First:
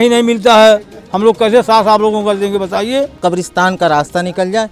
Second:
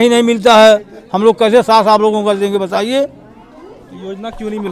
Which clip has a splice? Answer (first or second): first